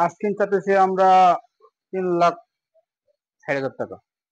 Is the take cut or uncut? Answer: uncut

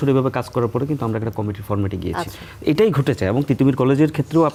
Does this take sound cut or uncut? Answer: uncut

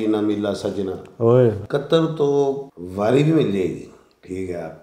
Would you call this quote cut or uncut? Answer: cut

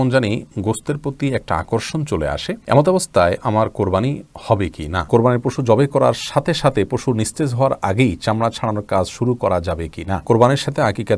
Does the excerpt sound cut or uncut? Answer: cut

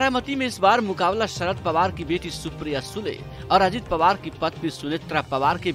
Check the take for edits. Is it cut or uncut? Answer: uncut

